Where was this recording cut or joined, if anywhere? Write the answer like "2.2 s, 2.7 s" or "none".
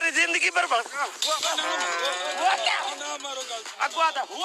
none

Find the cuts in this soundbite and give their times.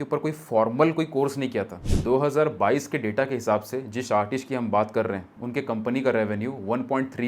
1.8 s, 5.4 s

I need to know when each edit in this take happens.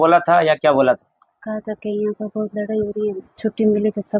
none

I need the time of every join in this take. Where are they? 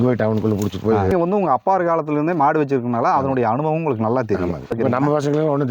1.1 s, 4.7 s

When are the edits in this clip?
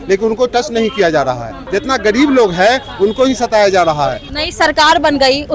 1.6 s, 4.3 s

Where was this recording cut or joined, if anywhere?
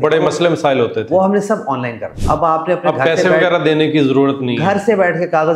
2.1 s

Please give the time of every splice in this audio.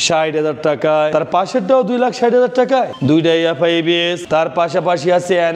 4.2 s

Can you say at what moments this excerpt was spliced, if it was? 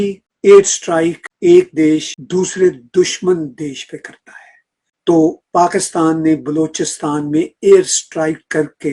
4.9 s

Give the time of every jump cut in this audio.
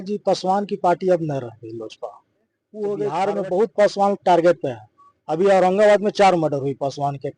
3.0 s

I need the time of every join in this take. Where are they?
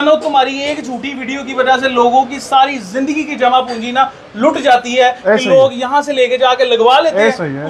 none

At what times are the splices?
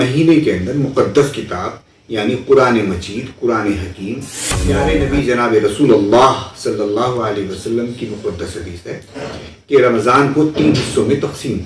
4.8 s

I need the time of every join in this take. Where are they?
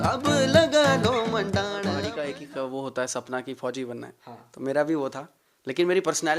2.1 s

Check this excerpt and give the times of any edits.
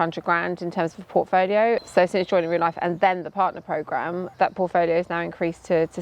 1.8 s, 4.3 s

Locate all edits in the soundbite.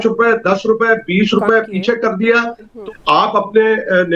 2.7 s

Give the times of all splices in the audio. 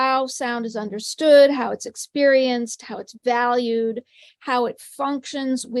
none

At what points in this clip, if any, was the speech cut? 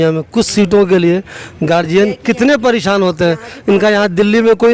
none

